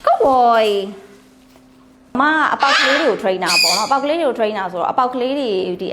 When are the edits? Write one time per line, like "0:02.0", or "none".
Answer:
0:02.0

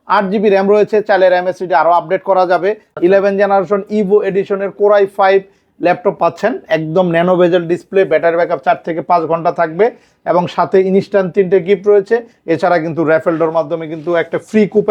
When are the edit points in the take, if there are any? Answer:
0:02.9

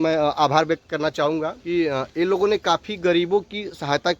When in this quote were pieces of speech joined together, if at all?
0:01.6

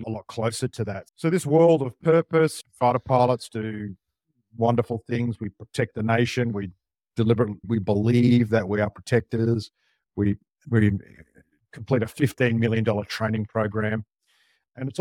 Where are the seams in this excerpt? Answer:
none

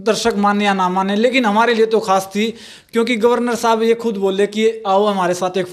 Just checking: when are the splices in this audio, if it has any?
none

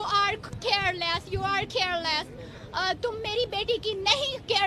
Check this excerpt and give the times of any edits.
0:02.1

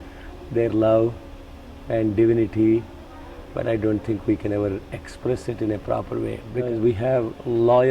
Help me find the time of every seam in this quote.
0:06.7

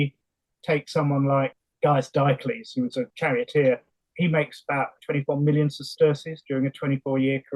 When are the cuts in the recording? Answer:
0:01.5
0:03.1
0:04.0
0:05.0

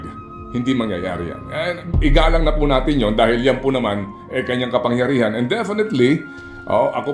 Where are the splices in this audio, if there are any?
none

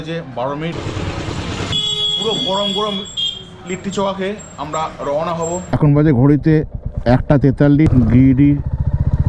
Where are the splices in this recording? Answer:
0:00.7
0:01.7
0:05.7
0:07.9

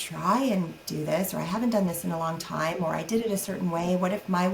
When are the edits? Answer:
none

